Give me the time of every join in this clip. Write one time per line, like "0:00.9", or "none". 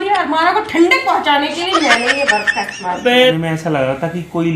0:03.3